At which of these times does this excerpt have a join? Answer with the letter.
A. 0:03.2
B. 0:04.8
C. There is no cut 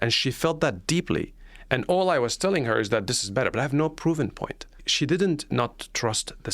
B